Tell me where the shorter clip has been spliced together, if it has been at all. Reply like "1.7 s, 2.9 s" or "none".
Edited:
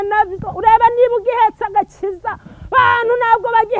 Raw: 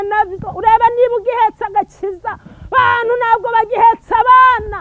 none